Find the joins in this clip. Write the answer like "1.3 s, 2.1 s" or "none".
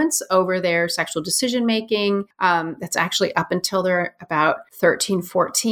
2.3 s, 4.7 s

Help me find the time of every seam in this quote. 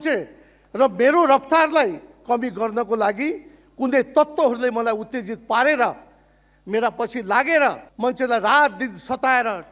7.9 s

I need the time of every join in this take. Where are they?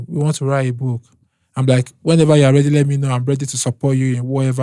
none

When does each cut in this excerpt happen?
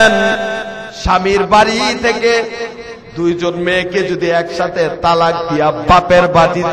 none

